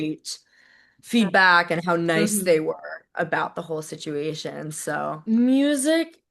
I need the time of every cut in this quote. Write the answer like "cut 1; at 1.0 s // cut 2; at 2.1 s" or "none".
cut 1; at 5.2 s